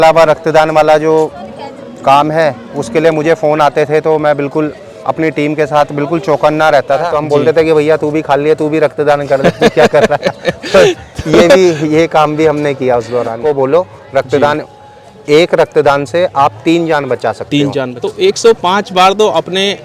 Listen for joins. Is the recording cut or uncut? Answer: cut